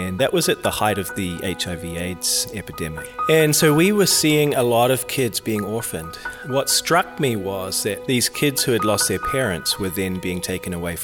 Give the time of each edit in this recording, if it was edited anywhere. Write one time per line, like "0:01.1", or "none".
0:03.1
0:06.3